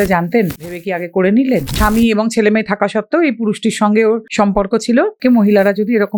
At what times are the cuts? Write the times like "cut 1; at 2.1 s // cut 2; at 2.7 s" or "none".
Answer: cut 1; at 0.8 s // cut 2; at 1.7 s // cut 3; at 4.3 s // cut 4; at 5.2 s

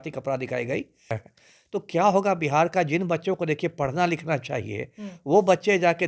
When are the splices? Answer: cut 1; at 1.3 s

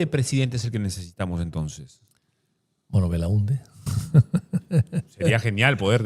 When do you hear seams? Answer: none

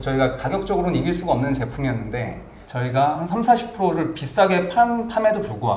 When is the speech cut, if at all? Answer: cut 1; at 2.5 s

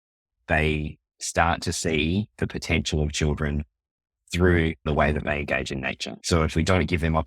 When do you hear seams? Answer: cut 1; at 4.9 s // cut 2; at 6.1 s

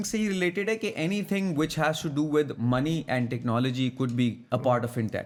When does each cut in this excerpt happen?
none

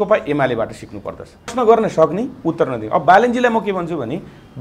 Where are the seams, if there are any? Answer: cut 1; at 1.5 s

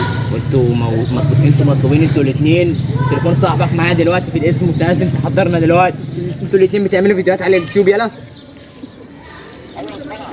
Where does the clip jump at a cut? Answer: cut 1; at 6.4 s

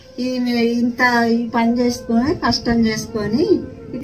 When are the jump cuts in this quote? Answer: none

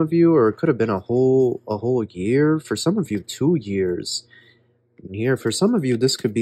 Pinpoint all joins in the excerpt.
cut 1; at 5.1 s

